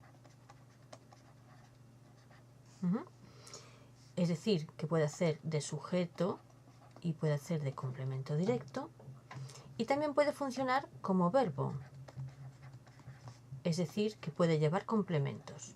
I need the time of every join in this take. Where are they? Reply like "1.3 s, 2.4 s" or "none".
13.9 s

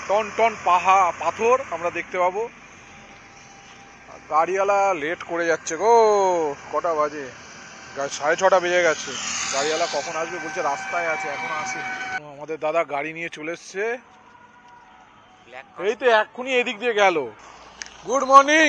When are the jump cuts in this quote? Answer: none

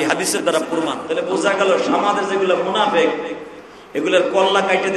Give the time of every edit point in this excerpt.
1.0 s

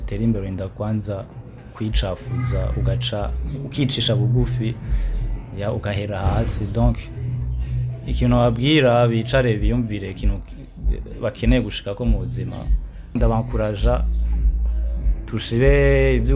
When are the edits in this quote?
13.1 s

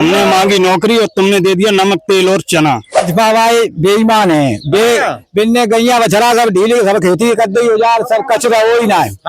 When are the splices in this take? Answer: 3.0 s

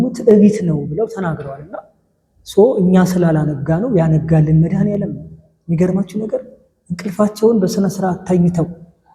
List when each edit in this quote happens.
none

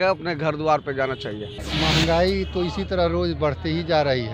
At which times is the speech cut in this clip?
1.6 s

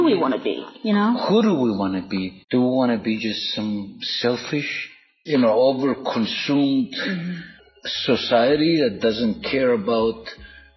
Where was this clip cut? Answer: 5.2 s

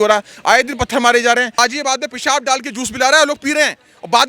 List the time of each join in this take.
1.6 s

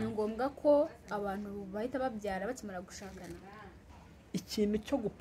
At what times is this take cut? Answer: 3.8 s

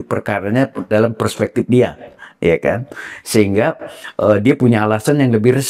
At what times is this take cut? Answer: none

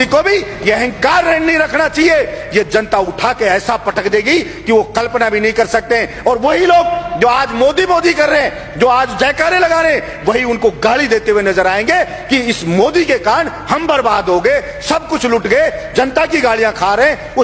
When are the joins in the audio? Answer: none

